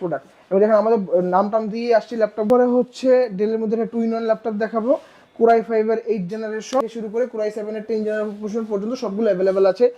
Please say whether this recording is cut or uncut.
cut